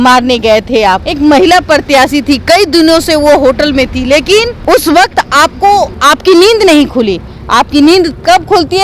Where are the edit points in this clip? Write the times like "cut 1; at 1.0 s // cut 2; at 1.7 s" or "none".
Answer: cut 1; at 1.1 s // cut 2; at 4.6 s // cut 3; at 6.0 s